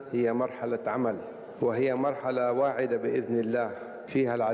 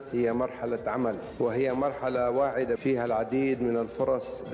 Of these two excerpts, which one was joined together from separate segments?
second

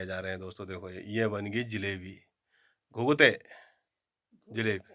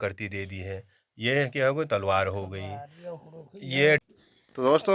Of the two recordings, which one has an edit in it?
second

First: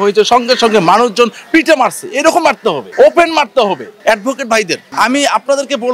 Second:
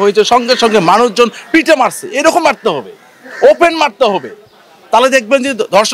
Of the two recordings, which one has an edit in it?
first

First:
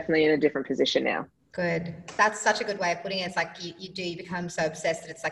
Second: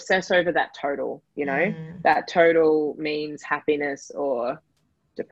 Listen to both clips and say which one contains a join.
first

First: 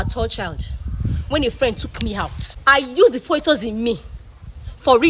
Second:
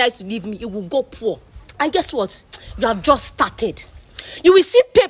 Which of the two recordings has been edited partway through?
first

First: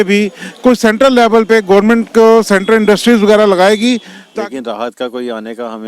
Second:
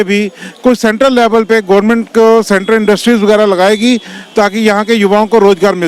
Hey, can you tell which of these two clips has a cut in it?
first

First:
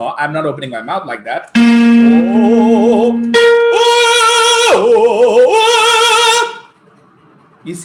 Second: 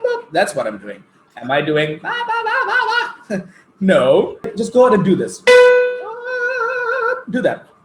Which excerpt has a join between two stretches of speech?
second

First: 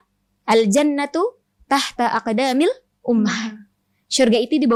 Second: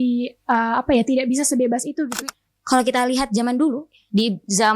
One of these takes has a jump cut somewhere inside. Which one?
second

